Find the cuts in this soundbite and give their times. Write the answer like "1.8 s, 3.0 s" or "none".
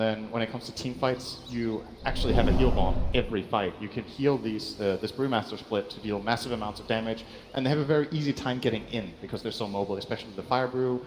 7.3 s